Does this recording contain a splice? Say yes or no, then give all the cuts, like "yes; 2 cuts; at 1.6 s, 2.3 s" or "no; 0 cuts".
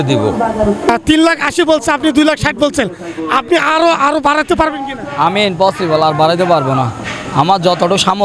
yes; 1 cut; at 1.0 s